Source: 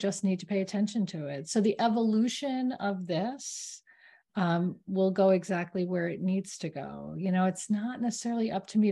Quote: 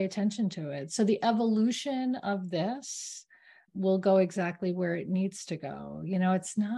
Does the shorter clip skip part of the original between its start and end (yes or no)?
yes